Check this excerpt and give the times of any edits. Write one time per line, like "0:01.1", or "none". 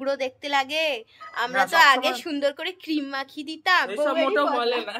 none

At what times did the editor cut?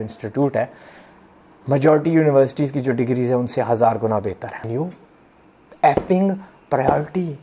0:04.6

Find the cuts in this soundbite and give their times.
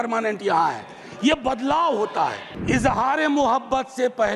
0:02.5

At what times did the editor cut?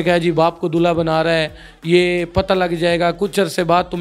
none

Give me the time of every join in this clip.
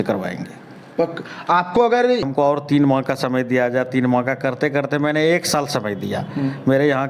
0:02.3

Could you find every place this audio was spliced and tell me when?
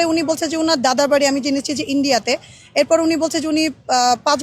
none

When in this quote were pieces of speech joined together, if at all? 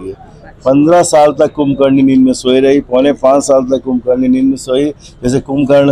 none

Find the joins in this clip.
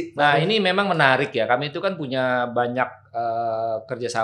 none

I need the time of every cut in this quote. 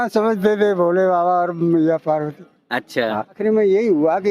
0:03.4

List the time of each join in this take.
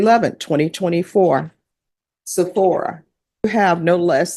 0:03.5

